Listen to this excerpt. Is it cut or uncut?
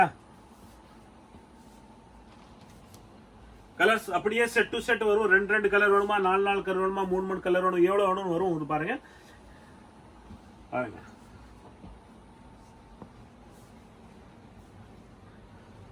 uncut